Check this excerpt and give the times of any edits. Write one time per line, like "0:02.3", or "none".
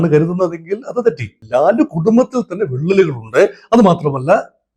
0:01.3